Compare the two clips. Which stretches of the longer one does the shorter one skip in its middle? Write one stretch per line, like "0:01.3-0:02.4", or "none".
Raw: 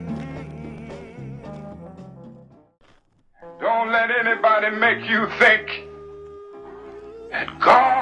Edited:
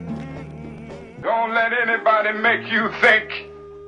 0:01.2-0:03.6